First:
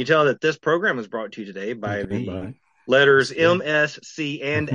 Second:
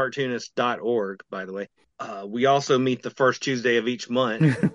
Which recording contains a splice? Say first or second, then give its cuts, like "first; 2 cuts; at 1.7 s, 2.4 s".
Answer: second; 1 cut; at 1.8 s